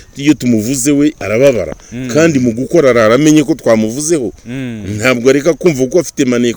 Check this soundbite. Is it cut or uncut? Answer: uncut